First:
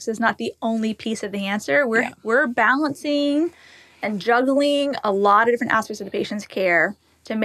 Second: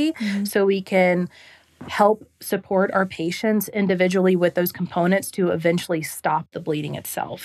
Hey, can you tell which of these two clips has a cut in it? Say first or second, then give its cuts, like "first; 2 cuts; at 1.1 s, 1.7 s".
second; 1 cut; at 6.5 s